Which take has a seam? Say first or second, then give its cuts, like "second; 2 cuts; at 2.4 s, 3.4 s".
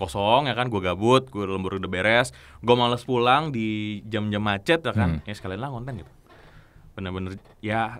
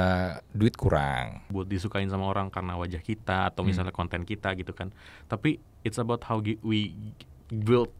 second; 1 cut; at 1.5 s